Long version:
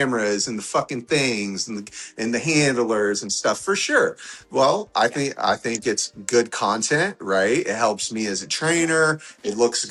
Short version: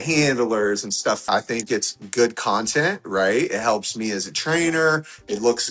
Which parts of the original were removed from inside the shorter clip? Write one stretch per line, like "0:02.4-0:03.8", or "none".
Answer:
0:03.6-0:05.4